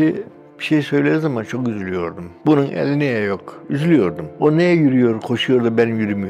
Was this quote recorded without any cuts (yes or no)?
yes